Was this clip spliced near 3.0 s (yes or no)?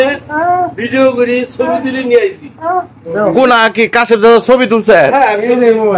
yes